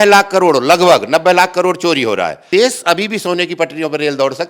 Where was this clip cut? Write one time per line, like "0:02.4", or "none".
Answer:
0:02.4